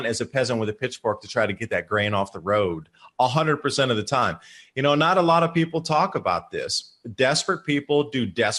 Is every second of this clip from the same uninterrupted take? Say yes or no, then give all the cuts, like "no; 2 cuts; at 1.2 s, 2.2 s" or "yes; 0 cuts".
yes; 0 cuts